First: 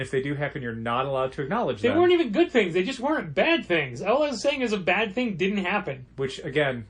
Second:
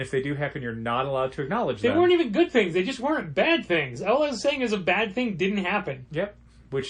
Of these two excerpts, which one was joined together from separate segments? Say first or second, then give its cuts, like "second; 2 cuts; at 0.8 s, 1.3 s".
first; 1 cut; at 6.0 s